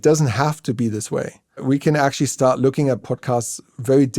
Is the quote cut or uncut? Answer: cut